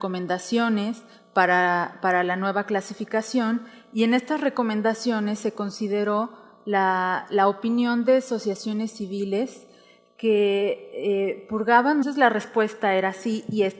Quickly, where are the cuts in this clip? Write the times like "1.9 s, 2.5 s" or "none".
none